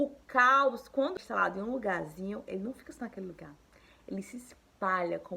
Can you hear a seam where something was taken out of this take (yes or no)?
yes